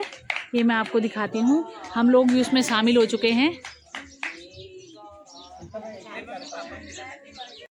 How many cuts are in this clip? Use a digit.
0